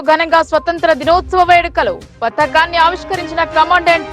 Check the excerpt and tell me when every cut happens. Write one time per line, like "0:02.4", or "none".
none